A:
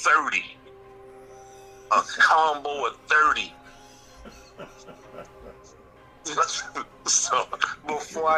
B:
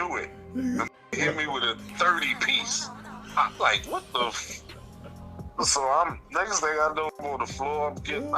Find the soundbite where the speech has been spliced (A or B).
B